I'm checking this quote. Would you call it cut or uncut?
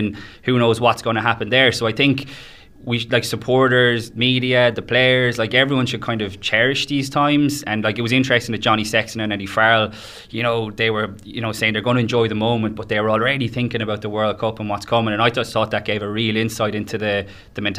uncut